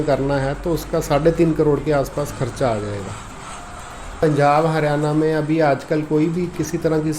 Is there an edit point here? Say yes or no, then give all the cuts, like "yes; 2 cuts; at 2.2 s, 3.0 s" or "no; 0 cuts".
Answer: yes; 1 cut; at 4.2 s